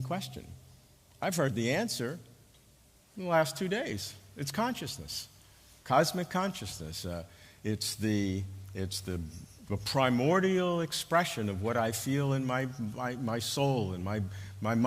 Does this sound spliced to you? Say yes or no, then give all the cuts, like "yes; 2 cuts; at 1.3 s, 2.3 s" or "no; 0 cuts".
yes; 1 cut; at 10.9 s